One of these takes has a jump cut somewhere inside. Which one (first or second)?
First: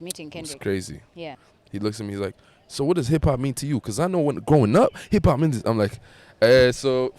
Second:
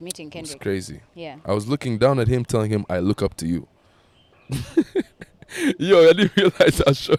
first